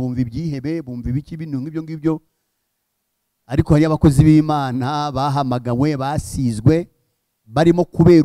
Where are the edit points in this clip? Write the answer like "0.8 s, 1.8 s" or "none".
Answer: none

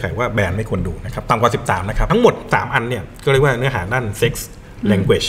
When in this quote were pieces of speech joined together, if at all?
2.0 s

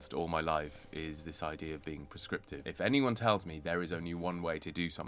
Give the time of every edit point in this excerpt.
2.6 s

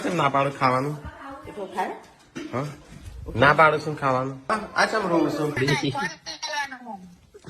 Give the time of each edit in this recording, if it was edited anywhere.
4.4 s, 5.6 s

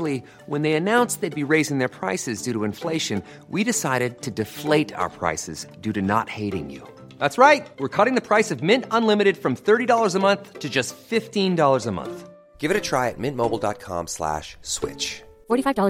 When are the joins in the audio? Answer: none

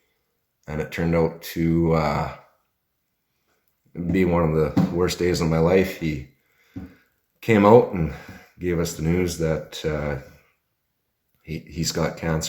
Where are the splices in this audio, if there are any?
none

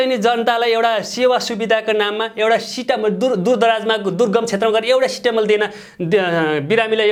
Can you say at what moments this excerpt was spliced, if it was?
none

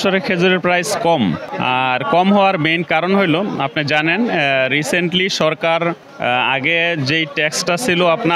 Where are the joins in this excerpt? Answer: none

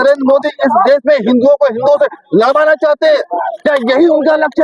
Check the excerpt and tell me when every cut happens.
none

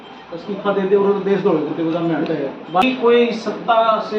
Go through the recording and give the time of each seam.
2.8 s

